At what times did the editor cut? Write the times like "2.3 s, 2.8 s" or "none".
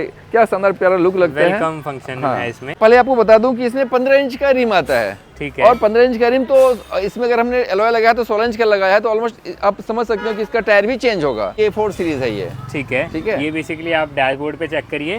2.7 s, 11.5 s